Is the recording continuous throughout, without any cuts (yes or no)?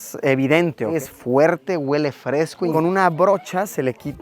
no